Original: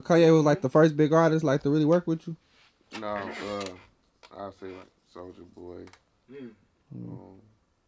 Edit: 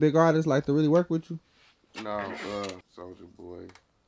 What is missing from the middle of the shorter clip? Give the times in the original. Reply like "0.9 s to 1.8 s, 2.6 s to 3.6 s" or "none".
3.8 s to 5.1 s

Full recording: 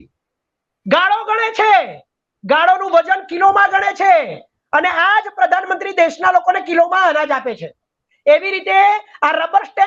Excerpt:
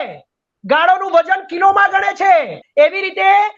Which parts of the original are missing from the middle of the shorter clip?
4.4 s to 8.1 s

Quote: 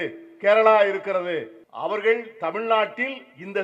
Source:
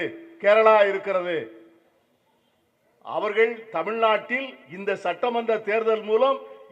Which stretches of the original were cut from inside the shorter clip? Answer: 1.6 s to 2.9 s

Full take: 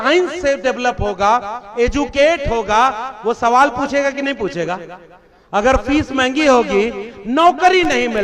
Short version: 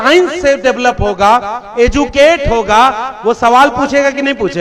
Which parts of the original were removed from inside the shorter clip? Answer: none

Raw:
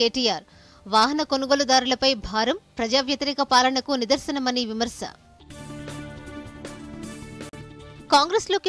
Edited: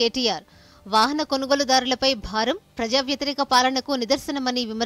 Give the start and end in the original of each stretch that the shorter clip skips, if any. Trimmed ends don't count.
none

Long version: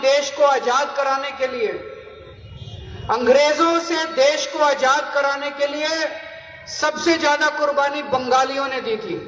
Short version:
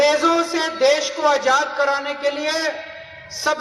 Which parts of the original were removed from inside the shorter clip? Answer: none

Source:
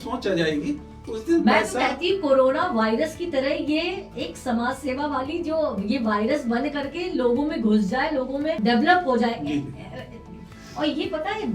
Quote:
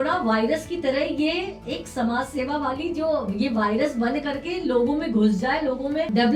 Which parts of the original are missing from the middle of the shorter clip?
none

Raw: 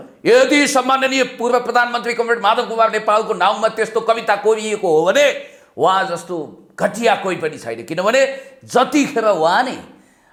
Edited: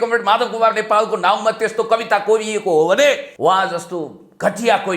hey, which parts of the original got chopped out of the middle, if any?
5.5 s to 5.7 s

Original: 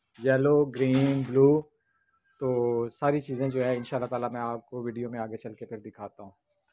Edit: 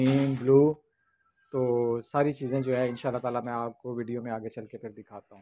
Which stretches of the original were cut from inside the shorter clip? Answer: none

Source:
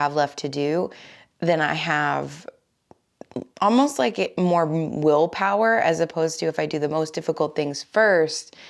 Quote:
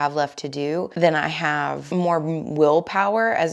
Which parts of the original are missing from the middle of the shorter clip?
0.9 s to 1.4 s, 2.3 s to 4.3 s

